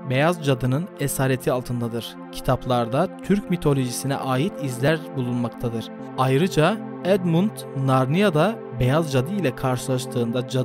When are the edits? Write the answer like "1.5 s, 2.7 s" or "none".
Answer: 6.0 s